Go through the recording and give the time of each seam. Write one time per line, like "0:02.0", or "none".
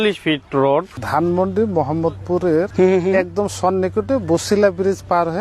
0:00.9
0:02.7